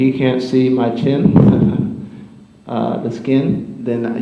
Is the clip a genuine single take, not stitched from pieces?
yes; 0 cuts

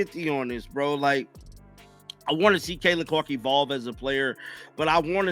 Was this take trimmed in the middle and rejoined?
no; 0 cuts

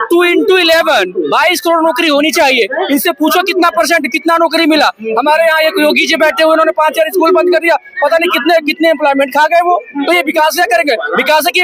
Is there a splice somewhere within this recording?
no; 0 cuts

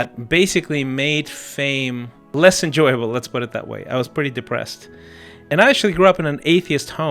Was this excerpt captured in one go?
no; 2 cuts; at 2.2 s, 5.4 s

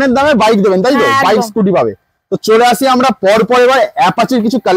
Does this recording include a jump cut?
no; 0 cuts

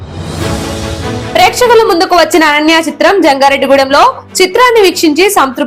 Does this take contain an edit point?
no; 0 cuts

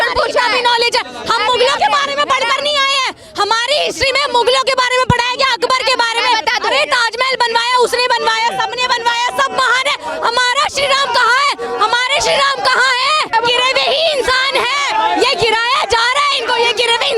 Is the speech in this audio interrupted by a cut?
yes; 1 cut; at 13.3 s

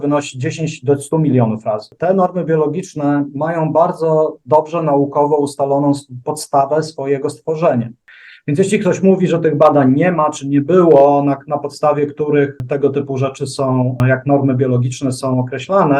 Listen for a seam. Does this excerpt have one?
yes; 4 cuts; at 1.9 s, 8.0 s, 12.6 s, 14.0 s

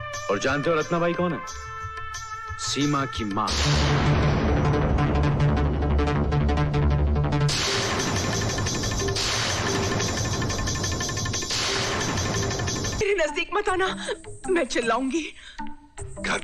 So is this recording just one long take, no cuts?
no; 1 cut; at 13.0 s

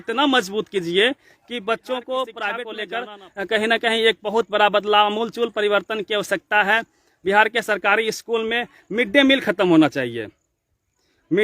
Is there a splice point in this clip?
yes; 1 cut; at 2.8 s

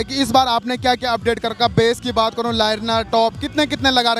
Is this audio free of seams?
yes; 0 cuts

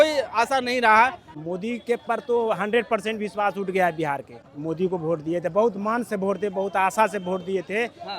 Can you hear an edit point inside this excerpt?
yes; 2 cuts; at 1.3 s, 4.5 s

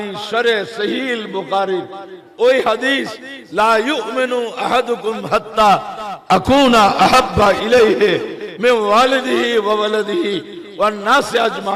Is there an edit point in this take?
no; 0 cuts

